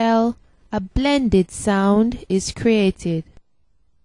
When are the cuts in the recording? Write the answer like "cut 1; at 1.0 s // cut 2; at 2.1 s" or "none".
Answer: none